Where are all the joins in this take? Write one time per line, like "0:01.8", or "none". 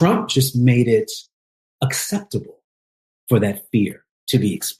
none